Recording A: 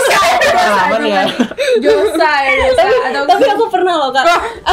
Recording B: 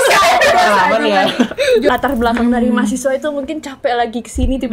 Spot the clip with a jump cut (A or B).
B